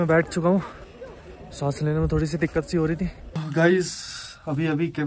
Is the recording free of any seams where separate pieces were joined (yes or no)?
no